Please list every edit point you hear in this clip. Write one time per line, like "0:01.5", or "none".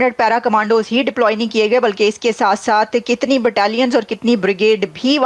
none